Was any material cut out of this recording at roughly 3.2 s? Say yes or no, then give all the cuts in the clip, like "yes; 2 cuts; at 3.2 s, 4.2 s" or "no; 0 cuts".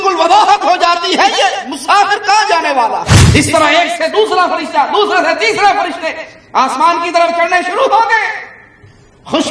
yes; 1 cut; at 3.2 s